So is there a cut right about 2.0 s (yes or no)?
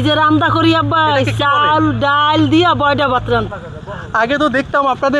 no